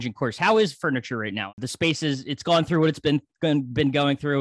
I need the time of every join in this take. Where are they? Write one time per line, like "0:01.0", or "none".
0:01.5